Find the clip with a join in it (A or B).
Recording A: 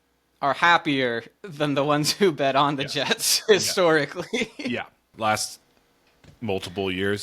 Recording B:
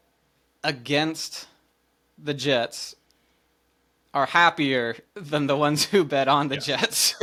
A